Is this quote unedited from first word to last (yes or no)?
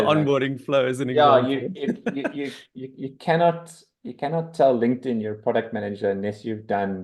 yes